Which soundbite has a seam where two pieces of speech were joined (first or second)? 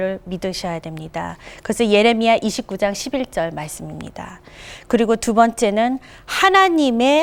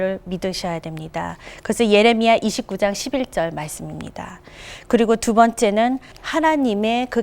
second